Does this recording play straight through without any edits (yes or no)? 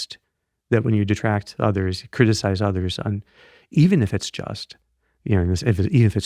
yes